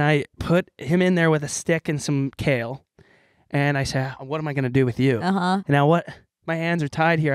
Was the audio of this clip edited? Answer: no; 0 cuts

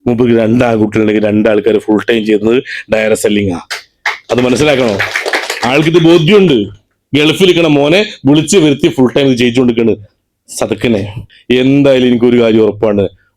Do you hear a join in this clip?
yes; 1 cut; at 11.3 s

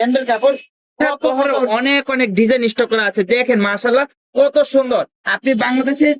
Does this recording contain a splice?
yes; 1 cut; at 1.1 s

